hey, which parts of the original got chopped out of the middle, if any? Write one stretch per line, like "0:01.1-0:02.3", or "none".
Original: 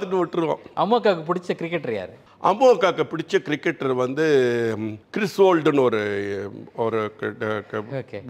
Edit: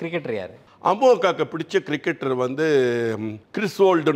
none